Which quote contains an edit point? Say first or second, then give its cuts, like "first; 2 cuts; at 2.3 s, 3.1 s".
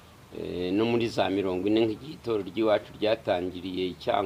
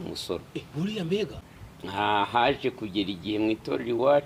second; 1 cut; at 1.4 s